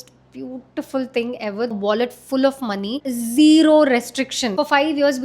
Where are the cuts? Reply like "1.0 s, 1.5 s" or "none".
1.7 s, 3.0 s, 4.5 s

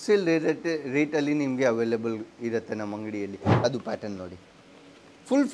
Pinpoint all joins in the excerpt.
3.6 s

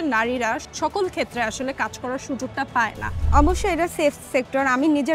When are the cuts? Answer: 3.1 s

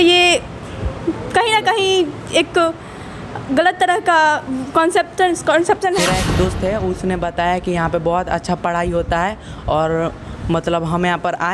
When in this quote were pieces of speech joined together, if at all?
6.0 s

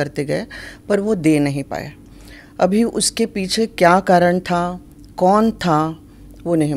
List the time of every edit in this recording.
none

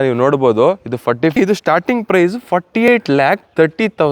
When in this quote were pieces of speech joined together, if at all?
1.3 s, 2.7 s

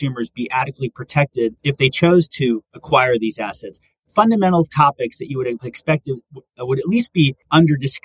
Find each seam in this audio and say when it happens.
1.6 s, 2.7 s

